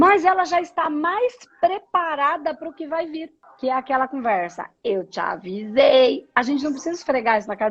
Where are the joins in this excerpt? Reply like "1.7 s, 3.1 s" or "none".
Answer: 3.4 s